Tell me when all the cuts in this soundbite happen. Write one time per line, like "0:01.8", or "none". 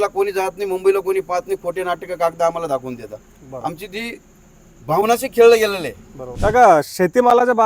none